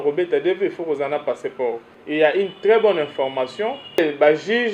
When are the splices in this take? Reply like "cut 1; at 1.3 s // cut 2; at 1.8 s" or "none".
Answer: cut 1; at 1.9 s // cut 2; at 4.0 s